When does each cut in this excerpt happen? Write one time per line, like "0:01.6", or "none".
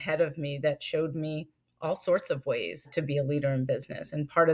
0:02.9

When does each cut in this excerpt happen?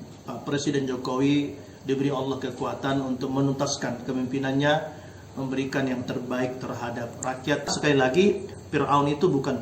0:07.7

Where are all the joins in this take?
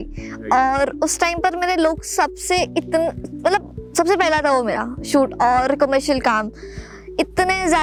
none

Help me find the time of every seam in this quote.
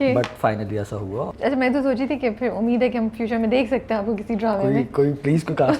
0:01.3

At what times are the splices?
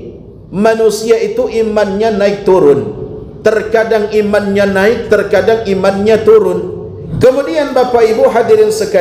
0:07.0

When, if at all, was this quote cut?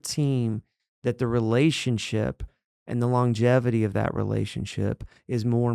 none

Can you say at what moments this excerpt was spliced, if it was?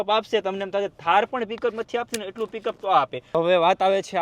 0:03.2

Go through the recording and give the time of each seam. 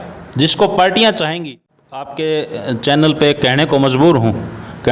0:01.4

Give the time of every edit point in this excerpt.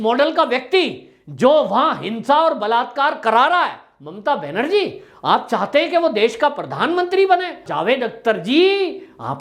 0:07.6

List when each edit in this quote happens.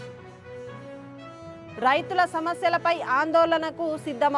0:01.3

